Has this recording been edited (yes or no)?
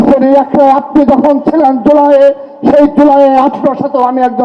no